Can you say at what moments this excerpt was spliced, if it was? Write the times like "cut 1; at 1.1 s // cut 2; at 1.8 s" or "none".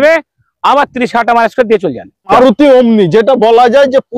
cut 1; at 2.3 s